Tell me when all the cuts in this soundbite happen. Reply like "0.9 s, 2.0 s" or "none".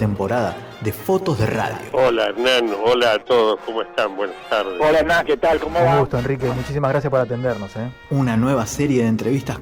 none